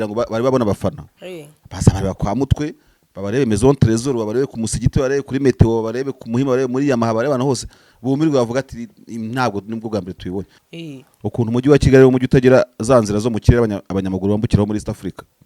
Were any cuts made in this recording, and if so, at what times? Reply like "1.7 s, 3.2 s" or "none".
10.6 s